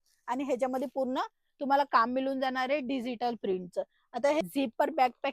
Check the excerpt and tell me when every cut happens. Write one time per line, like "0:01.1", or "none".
0:04.4